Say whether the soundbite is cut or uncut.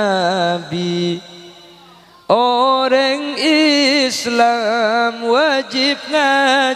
uncut